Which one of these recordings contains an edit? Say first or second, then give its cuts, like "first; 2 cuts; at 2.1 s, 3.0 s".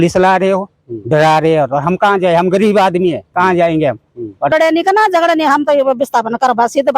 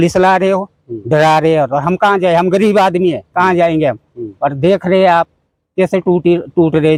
first; 1 cut; at 4.5 s